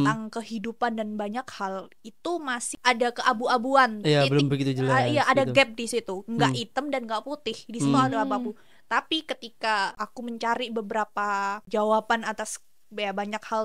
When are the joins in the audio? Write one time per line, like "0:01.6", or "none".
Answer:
0:02.6
0:09.9
0:11.6

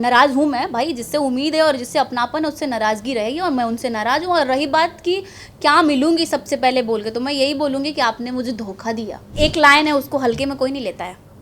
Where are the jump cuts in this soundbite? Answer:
0:09.3

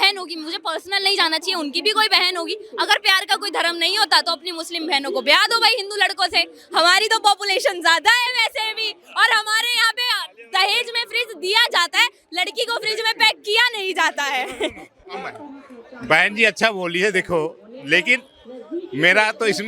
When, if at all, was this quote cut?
none

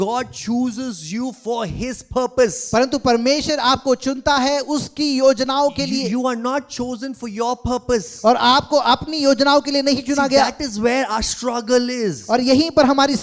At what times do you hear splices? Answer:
none

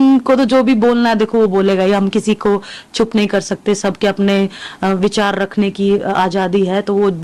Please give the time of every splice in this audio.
none

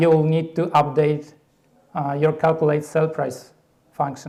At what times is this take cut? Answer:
none

